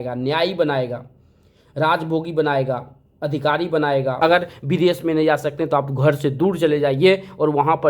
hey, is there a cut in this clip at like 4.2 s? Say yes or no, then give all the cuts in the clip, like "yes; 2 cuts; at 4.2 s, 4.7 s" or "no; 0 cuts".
yes; 1 cut; at 4.2 s